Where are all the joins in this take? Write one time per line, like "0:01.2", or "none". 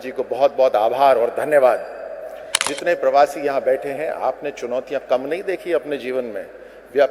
0:02.7